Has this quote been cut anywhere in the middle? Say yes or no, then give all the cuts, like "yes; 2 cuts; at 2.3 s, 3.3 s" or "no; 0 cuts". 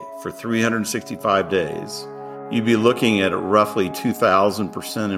no; 0 cuts